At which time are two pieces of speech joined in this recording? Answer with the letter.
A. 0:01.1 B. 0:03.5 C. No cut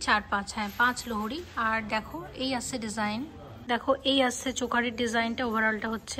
B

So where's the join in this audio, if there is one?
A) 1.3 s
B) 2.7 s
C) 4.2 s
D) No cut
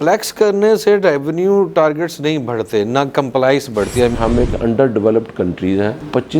C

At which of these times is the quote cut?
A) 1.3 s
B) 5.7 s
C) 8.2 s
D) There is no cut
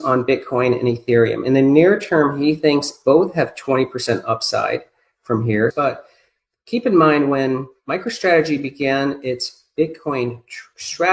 B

